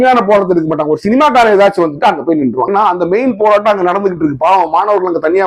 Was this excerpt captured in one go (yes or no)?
no